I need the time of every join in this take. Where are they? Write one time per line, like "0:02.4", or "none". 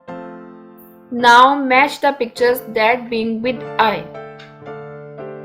0:01.0
0:04.0